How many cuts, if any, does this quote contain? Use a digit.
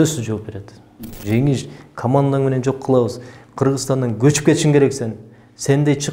1